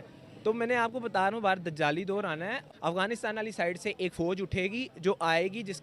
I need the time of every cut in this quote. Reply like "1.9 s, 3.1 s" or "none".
2.6 s

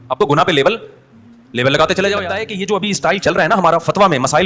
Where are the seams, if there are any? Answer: 2.4 s

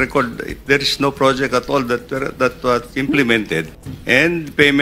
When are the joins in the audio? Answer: none

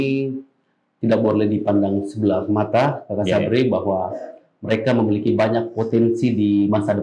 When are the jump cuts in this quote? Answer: none

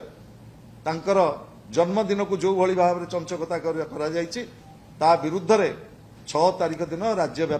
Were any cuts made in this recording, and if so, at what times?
none

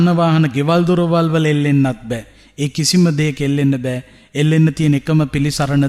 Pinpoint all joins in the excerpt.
none

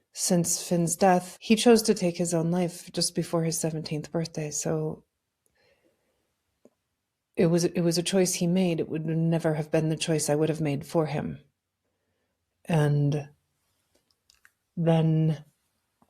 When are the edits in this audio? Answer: 1.3 s

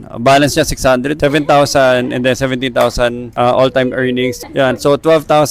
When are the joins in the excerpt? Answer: 1.2 s, 4.4 s

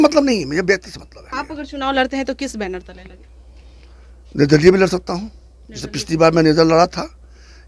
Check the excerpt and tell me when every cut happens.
1.2 s

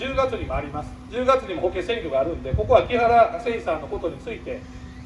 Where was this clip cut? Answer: 0.9 s

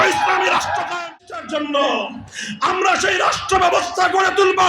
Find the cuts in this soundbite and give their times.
1.1 s

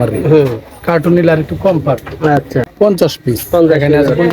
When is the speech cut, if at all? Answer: 2.6 s

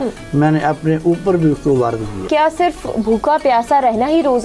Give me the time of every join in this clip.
2.2 s

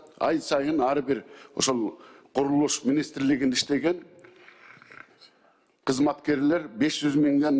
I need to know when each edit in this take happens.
none

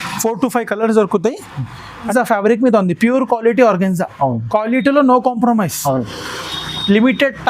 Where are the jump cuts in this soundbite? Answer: 2.1 s

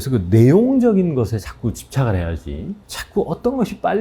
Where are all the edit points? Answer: 2.9 s

